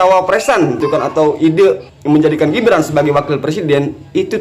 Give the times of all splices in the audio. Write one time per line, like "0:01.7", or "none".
0:00.8
0:01.9